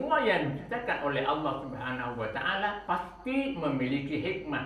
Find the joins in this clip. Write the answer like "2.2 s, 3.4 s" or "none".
2.8 s